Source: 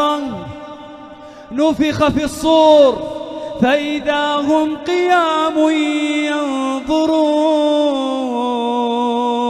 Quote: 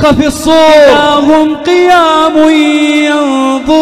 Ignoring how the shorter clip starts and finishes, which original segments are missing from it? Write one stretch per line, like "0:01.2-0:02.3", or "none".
0:02.9-0:04.2